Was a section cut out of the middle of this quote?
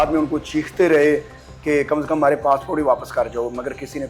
no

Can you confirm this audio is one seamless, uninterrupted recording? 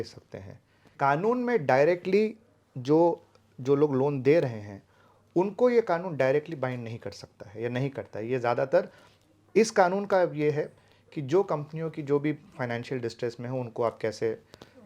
no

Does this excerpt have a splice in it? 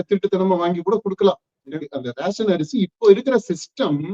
yes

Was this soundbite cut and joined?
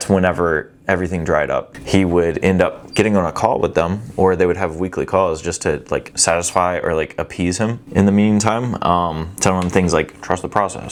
no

